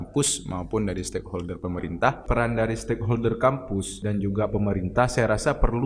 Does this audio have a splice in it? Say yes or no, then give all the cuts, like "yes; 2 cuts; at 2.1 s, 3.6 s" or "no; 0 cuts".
yes; 2 cuts; at 2.2 s, 3.9 s